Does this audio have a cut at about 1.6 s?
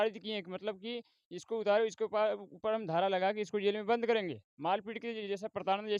no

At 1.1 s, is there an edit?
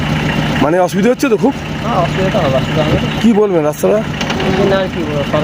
no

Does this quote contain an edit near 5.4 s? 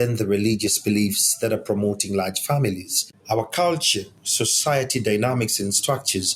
no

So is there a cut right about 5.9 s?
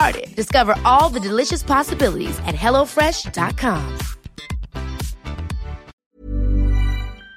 yes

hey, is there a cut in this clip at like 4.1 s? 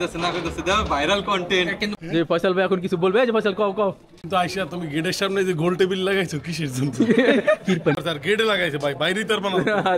yes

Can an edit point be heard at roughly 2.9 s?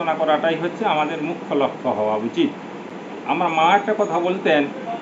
yes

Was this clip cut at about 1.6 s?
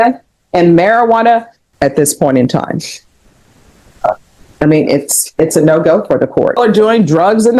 yes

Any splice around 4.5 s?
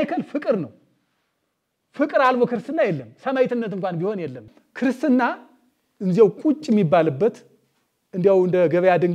yes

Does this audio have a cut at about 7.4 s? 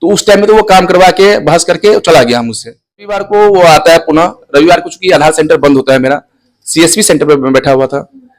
no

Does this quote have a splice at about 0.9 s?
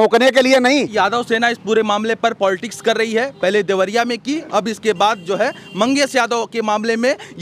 yes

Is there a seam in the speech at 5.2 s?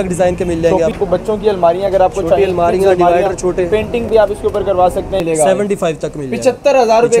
yes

